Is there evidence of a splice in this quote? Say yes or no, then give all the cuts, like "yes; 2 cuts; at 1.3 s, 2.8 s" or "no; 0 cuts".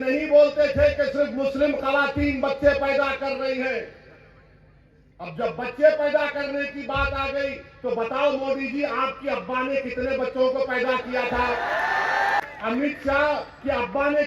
yes; 1 cut; at 12.4 s